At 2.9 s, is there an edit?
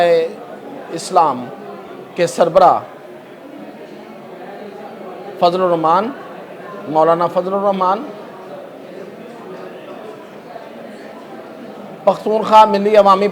no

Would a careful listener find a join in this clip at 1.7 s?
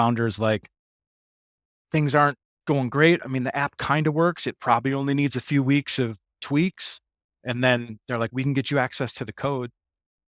no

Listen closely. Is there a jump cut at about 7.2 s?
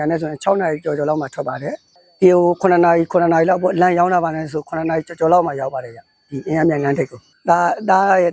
yes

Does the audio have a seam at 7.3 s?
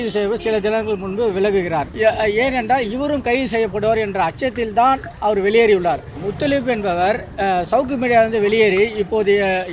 yes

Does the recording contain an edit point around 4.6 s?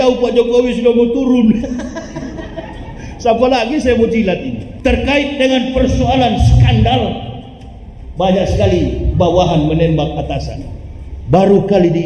yes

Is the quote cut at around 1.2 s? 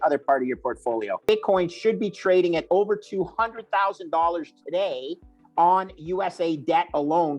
yes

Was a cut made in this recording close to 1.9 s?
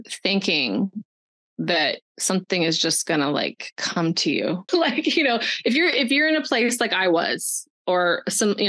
no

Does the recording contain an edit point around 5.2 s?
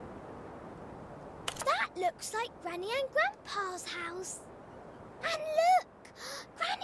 no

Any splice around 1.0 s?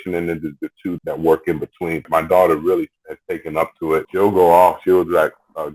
yes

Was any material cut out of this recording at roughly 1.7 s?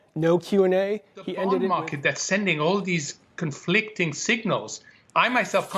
yes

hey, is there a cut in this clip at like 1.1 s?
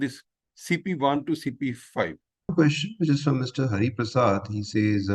no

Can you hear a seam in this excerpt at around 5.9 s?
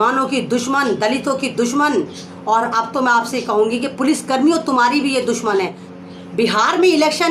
yes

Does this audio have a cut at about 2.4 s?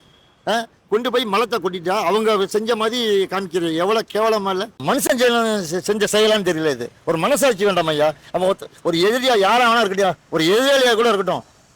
no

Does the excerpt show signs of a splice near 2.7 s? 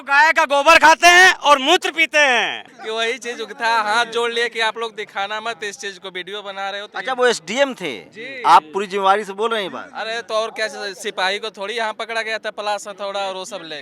yes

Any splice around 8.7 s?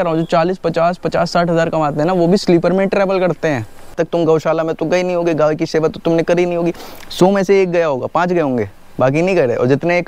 no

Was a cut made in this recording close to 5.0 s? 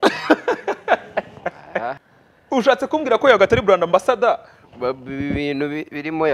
no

